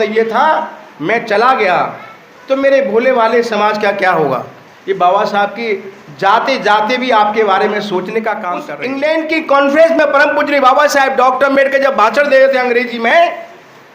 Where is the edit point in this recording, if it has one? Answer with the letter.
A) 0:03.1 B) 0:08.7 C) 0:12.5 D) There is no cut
B